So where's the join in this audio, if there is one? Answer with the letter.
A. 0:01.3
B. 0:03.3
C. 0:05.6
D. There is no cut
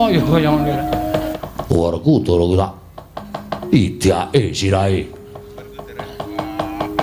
A